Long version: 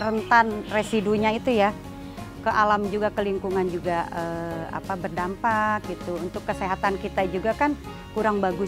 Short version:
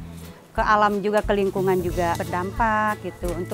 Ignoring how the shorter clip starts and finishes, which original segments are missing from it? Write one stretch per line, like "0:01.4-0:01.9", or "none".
0:04.1-0:05.0